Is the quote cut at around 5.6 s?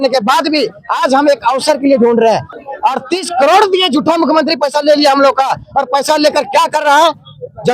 no; 1 cut; at 2.5 s

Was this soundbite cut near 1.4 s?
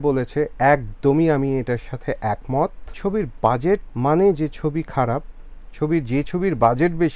no; 2 cuts; at 2.9 s, 3.9 s

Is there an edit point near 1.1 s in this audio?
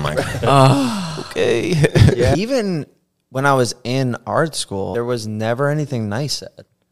no; 2 cuts; at 2.3 s, 4.9 s

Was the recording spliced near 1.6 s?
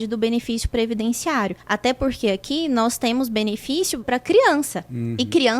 yes; 2 cuts; at 1.6 s, 4.1 s

